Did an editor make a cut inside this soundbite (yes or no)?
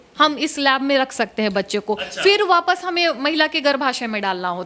no